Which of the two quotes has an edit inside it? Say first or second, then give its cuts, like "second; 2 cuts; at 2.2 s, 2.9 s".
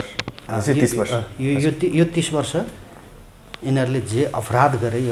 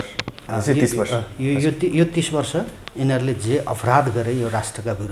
second; 1 cut; at 2.8 s